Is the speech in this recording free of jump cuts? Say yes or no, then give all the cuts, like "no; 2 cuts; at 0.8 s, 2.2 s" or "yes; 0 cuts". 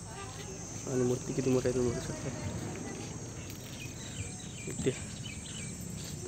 yes; 0 cuts